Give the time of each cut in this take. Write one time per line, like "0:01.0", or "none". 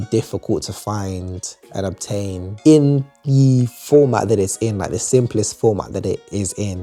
none